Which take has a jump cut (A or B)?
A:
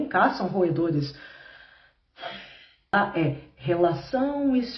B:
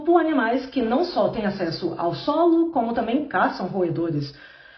A